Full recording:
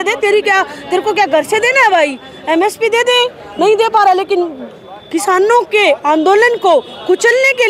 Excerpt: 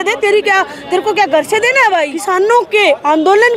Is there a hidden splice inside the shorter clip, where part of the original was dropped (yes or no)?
yes